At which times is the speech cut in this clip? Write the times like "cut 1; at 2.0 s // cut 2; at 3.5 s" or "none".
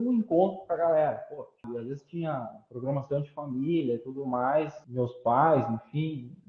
cut 1; at 1.7 s // cut 2; at 4.8 s